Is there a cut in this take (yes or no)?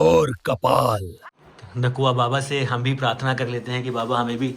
yes